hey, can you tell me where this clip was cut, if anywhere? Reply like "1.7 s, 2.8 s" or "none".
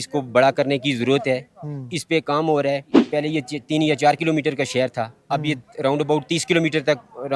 3.0 s